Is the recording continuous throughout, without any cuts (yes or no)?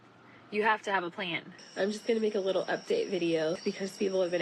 no